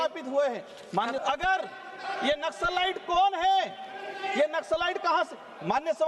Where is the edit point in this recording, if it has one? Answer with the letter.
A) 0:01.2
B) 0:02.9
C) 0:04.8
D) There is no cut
A